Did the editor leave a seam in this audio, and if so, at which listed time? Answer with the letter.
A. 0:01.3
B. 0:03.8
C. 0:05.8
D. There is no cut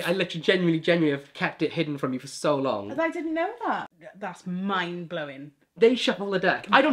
B